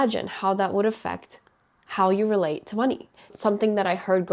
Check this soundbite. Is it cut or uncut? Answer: cut